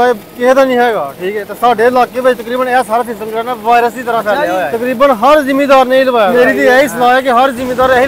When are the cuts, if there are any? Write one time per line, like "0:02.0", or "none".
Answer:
0:04.7
0:06.3